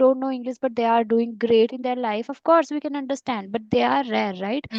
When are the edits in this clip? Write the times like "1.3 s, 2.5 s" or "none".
none